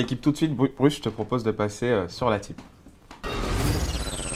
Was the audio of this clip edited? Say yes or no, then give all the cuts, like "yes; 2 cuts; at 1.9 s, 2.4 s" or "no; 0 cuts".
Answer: no; 0 cuts